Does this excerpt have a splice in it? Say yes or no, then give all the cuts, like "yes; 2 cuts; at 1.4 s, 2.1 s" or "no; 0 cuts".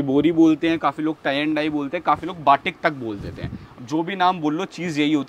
no; 0 cuts